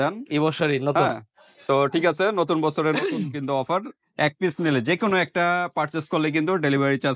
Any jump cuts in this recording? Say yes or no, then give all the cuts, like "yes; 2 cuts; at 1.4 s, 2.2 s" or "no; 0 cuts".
no; 0 cuts